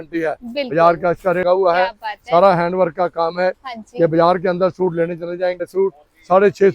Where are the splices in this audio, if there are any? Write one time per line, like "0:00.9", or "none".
0:01.4
0:05.6